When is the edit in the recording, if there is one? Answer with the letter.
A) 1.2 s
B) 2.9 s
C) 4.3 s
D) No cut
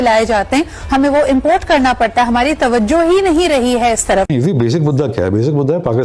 C